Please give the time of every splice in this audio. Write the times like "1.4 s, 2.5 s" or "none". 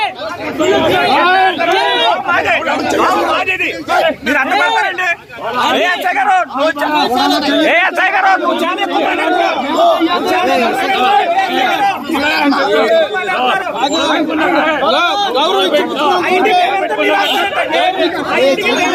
none